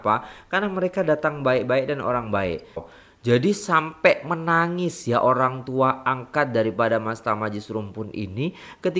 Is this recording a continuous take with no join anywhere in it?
no; 1 cut; at 2.9 s

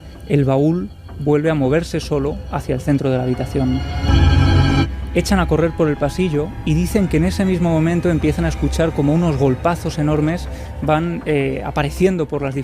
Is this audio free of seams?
no; 1 cut; at 4.9 s

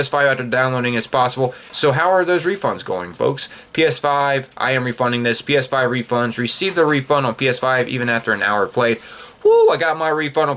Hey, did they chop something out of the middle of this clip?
yes; 1 cut; at 1.7 s

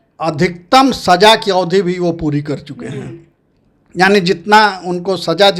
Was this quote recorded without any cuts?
yes; 0 cuts

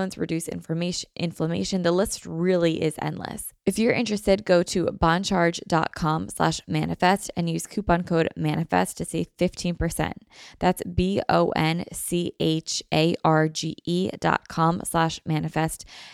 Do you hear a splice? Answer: yes; 1 cut; at 3.5 s

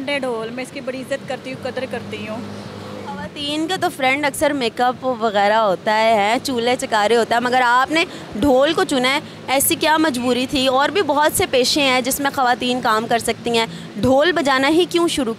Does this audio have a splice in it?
no; 0 cuts

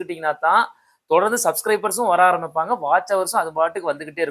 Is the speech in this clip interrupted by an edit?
no; 0 cuts

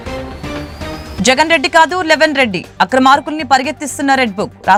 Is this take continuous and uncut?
yes; 0 cuts

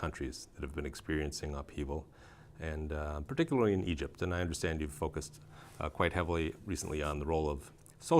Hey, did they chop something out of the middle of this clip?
yes; 1 cut; at 4.7 s

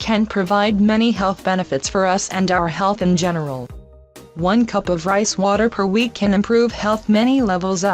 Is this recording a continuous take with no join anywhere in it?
no; 1 cut; at 5.5 s

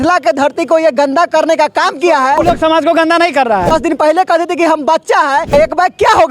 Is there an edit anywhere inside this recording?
yes; 3 cuts; at 2.4 s, 3.7 s, 5.5 s

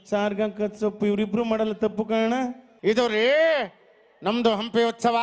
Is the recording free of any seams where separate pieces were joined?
no; 1 cut; at 2.6 s

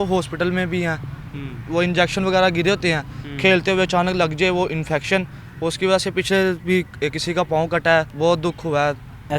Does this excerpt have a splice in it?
no; 0 cuts

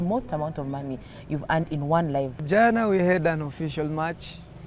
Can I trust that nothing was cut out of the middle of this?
no; 1 cut; at 2.4 s

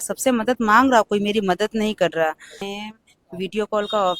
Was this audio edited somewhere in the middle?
yes; 1 cut; at 2.7 s

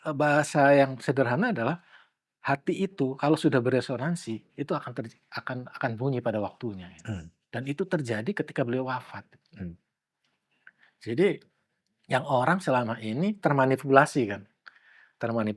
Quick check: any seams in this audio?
no; 0 cuts

